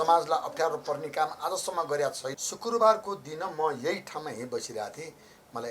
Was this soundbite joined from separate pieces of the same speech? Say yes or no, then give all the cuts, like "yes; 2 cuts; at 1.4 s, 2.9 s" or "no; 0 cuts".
yes; 1 cut; at 2.4 s